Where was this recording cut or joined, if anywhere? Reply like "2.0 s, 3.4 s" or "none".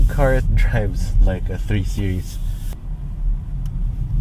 none